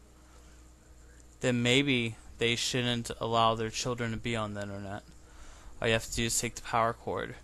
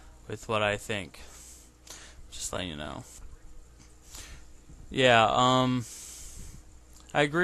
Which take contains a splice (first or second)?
second